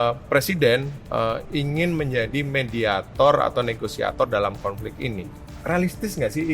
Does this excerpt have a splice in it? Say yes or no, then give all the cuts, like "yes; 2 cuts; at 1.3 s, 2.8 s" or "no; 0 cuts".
yes; 1 cut; at 5.5 s